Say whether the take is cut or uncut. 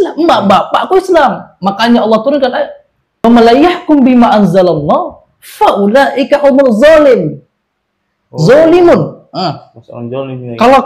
cut